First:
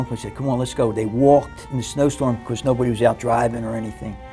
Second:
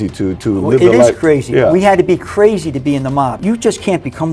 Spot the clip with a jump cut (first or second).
second